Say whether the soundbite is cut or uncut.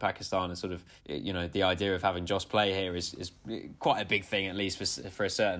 cut